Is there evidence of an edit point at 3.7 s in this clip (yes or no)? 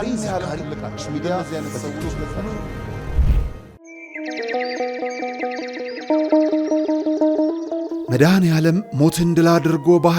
yes